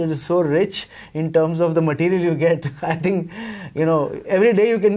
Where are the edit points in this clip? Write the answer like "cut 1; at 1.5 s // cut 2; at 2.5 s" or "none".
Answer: none